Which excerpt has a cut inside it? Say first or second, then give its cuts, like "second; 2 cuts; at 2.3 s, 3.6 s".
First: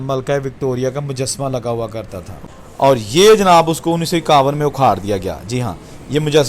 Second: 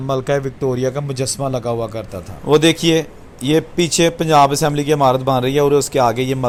first; 1 cut; at 2.3 s